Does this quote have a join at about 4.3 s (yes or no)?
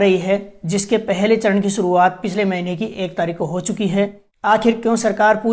yes